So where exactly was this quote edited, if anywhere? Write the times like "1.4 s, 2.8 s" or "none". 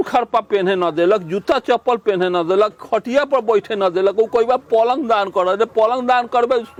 none